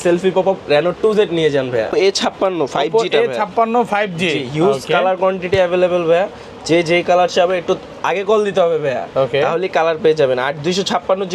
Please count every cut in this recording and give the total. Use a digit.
1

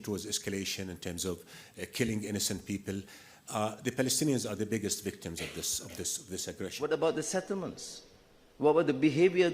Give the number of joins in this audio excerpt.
1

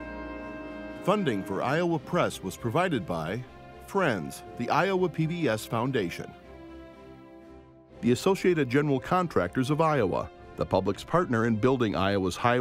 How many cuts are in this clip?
1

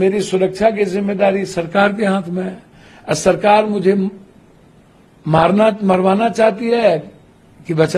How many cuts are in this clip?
0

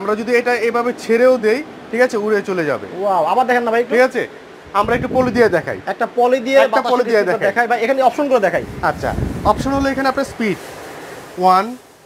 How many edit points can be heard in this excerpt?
0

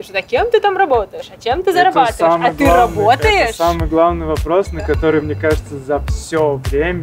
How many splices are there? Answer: 0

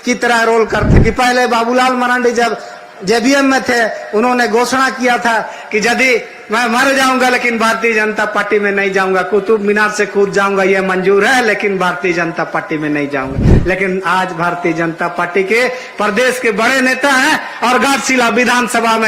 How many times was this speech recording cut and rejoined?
1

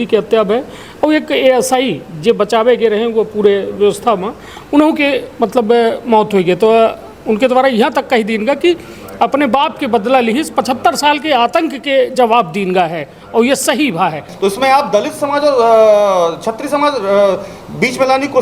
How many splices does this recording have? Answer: 1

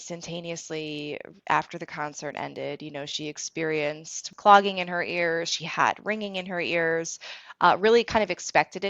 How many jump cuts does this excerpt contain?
1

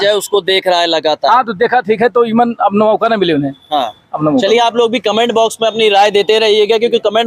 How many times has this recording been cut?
0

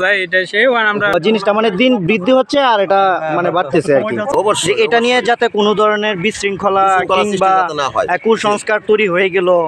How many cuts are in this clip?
2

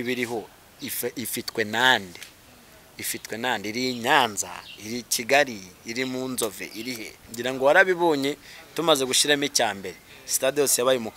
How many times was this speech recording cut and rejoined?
1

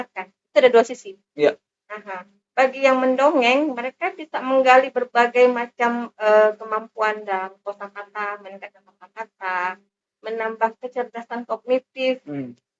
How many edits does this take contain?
0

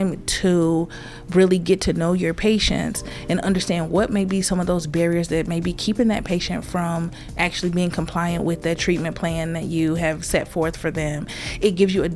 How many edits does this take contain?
0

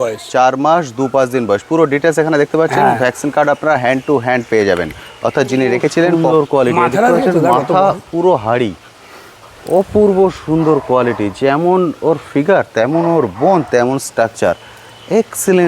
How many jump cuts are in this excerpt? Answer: 1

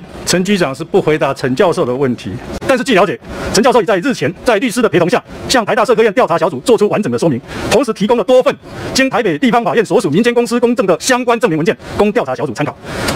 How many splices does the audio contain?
0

